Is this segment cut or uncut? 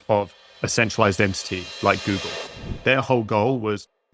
cut